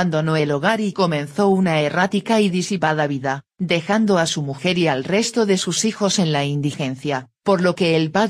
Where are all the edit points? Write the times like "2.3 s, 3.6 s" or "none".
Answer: 6.4 s